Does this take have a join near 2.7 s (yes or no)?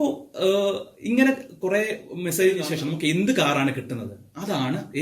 yes